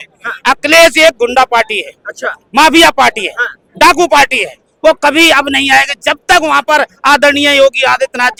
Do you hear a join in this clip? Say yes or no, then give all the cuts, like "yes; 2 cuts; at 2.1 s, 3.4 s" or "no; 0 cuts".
no; 0 cuts